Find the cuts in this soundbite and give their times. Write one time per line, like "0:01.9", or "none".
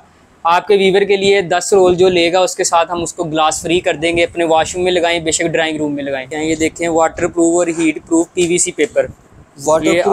0:06.3